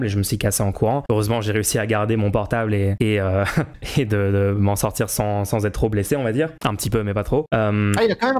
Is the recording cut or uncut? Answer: cut